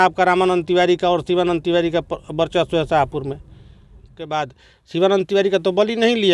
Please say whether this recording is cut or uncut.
cut